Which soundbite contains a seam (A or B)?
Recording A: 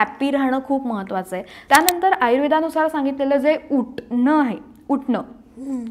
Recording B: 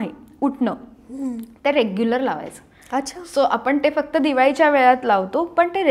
A